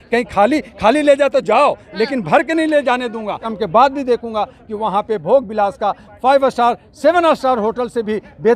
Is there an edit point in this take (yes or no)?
yes